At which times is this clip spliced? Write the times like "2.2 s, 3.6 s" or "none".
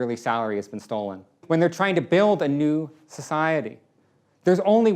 1.4 s